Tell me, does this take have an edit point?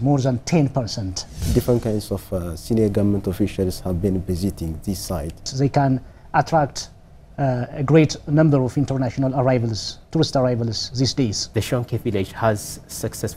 yes; 3 cuts; at 1.3 s, 5.5 s, 11.4 s

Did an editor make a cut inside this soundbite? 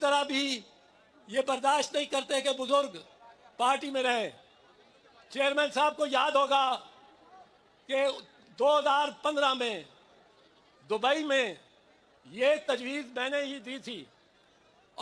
no; 0 cuts

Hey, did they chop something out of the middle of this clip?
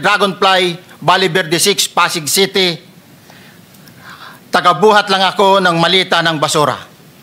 no; 0 cuts

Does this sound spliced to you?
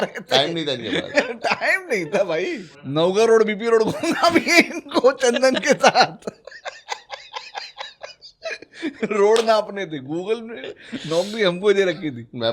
yes; 1 cut; at 2.8 s

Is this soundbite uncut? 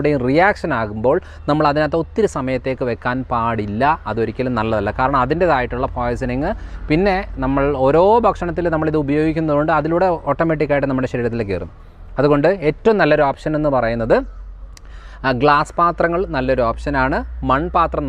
yes; 0 cuts

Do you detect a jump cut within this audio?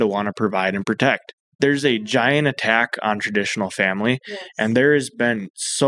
yes; 1 cut; at 1.3 s

